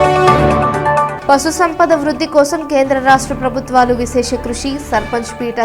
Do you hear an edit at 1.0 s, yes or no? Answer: yes